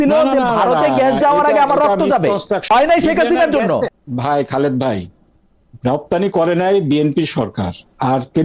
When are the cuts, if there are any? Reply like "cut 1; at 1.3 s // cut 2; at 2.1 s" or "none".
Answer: cut 1; at 2.6 s // cut 2; at 3.9 s